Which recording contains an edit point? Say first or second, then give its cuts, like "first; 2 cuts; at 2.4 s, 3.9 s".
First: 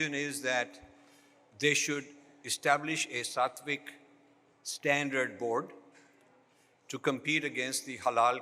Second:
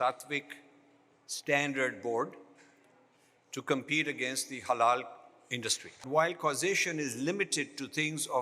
second; 1 cut; at 6.1 s